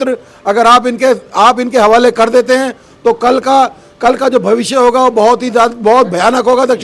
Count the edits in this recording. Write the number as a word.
zero